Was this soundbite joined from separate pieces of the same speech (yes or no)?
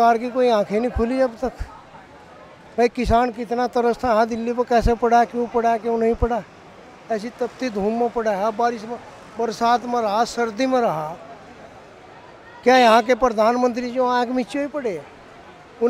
no